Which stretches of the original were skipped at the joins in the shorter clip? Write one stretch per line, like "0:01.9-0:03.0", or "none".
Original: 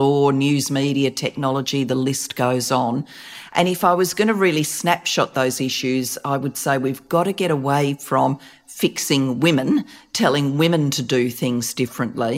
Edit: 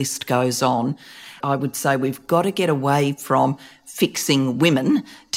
0:03.4-0:06.1